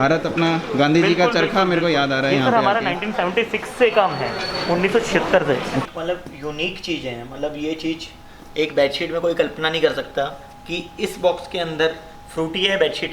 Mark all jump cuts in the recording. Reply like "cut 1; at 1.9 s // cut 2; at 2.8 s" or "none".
cut 1; at 5.9 s